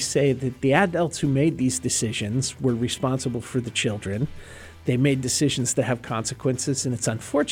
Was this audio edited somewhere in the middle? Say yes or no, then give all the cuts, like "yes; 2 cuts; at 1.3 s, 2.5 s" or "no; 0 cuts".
no; 0 cuts